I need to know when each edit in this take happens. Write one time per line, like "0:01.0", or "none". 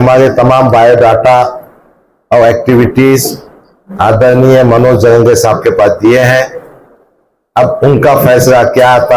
none